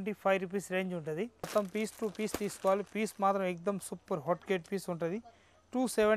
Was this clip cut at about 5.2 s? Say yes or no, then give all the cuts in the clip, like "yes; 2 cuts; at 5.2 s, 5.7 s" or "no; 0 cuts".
no; 1 cut; at 1.4 s